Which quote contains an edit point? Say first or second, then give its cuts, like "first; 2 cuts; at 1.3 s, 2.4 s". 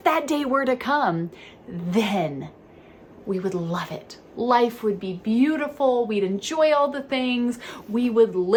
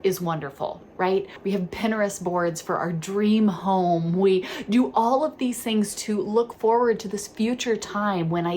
second; 1 cut; at 1.3 s